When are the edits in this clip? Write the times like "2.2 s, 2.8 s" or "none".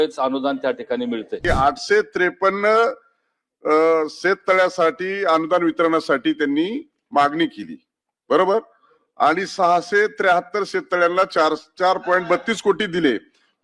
1.4 s